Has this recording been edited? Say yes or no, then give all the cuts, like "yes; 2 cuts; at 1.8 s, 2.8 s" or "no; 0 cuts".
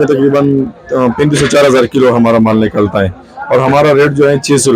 no; 0 cuts